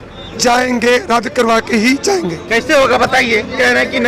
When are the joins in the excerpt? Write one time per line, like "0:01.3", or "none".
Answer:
none